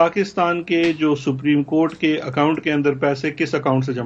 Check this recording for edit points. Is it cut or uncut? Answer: uncut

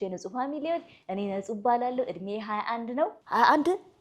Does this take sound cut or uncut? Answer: uncut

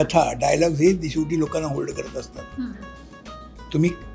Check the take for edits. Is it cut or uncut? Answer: uncut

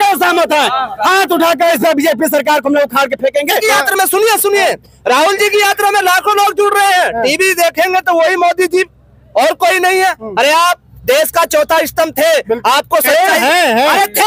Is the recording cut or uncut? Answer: cut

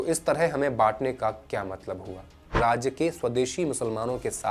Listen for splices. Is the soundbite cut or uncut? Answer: cut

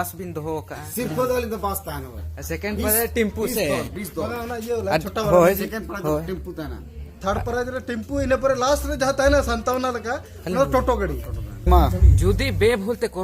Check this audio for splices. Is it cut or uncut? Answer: cut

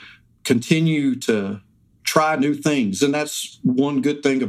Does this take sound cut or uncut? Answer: uncut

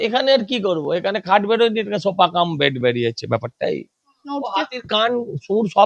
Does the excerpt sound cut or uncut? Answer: cut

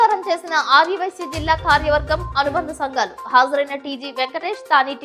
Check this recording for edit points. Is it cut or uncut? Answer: uncut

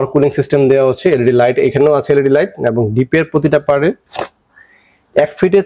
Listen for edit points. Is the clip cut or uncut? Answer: uncut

